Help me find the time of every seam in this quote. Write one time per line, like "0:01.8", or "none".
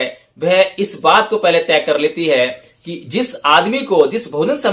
none